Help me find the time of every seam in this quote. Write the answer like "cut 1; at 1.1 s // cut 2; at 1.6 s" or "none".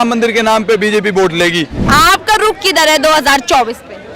cut 1; at 1.8 s

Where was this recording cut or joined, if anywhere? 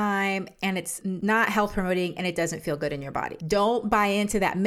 cut 1; at 1.1 s // cut 2; at 3.4 s

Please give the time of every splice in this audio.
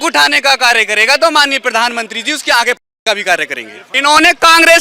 cut 1; at 3.9 s

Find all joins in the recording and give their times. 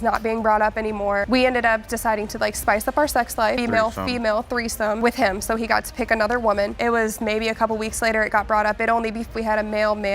cut 1; at 3.6 s // cut 2; at 6.8 s

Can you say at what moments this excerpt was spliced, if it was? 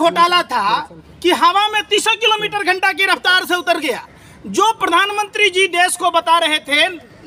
none

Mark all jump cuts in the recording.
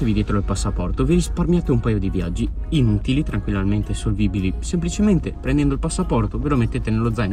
none

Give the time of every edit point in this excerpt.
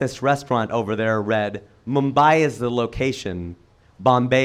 none

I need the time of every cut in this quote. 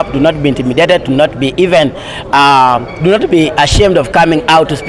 none

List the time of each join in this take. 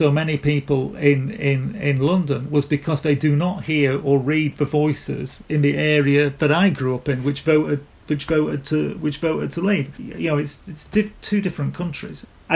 none

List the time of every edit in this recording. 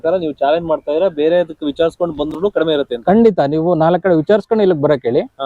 none

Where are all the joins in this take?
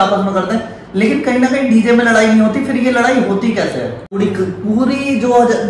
cut 1; at 4.2 s

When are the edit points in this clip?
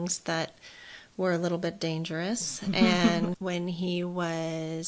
cut 1; at 3.3 s

